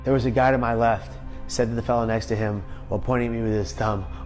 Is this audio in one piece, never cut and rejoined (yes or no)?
yes